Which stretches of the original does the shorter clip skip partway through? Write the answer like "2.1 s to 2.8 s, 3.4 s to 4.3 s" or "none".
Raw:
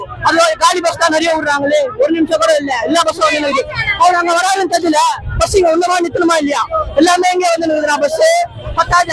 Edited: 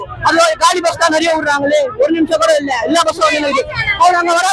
none